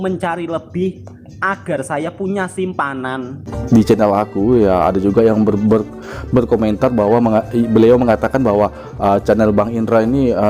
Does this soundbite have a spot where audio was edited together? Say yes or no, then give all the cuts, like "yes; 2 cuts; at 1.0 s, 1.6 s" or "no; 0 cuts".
yes; 1 cut; at 3.5 s